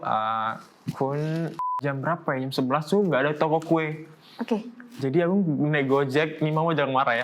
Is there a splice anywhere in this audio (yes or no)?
yes